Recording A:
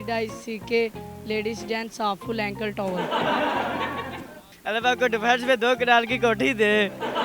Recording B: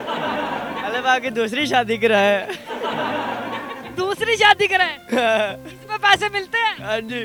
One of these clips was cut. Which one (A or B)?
A